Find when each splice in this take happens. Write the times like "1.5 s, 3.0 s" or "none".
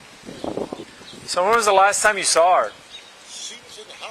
1.0 s